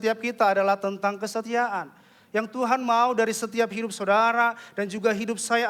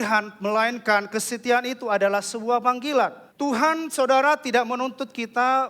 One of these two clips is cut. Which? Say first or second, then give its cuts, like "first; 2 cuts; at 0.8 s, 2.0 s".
second; 1 cut; at 3.2 s